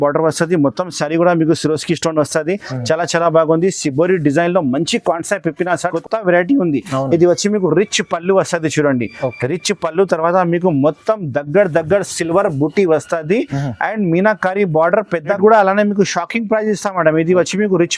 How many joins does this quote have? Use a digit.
2